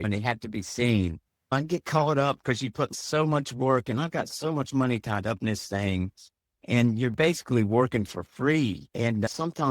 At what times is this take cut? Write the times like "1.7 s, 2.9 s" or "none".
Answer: 1.5 s